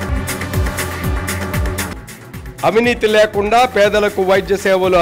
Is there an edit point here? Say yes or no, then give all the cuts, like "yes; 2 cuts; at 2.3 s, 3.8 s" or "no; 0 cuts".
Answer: yes; 1 cut; at 1.9 s